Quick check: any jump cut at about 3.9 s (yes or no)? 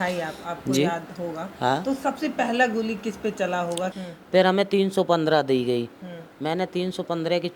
yes